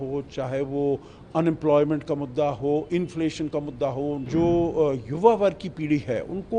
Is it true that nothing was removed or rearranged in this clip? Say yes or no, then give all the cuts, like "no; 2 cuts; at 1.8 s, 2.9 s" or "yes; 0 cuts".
no; 1 cut; at 4.2 s